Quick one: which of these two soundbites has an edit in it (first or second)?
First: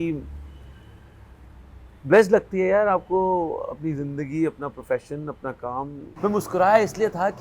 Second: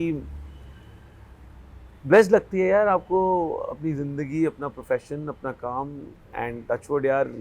first